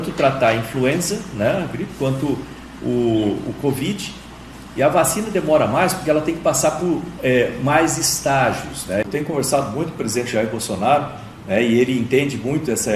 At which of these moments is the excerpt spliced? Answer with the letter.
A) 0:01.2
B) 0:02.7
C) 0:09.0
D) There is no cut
C